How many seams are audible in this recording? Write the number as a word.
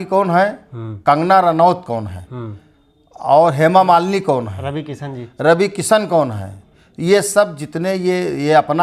zero